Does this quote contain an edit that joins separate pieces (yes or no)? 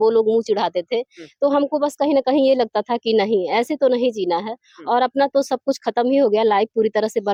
no